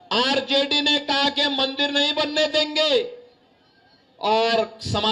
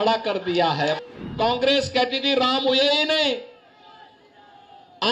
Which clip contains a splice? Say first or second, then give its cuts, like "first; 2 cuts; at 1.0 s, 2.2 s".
second; 1 cut; at 1.0 s